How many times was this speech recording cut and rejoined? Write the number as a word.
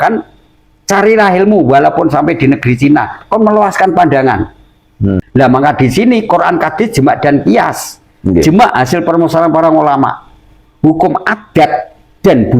one